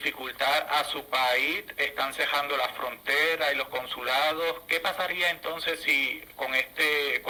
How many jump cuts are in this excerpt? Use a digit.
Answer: 0